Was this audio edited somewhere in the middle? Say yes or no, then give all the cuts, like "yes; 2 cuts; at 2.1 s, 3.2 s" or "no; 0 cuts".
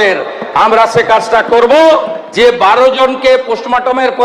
yes; 1 cut; at 2.2 s